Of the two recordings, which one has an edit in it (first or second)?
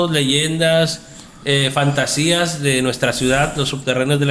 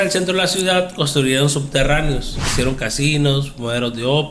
second